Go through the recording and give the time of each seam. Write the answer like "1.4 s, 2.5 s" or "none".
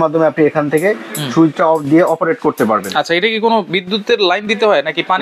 none